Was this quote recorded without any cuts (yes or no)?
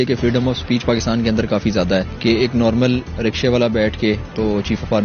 yes